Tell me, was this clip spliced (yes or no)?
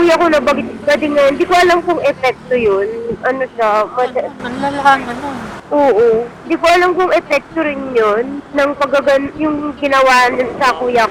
no